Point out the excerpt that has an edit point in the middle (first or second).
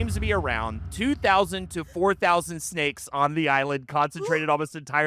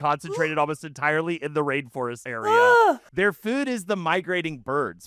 second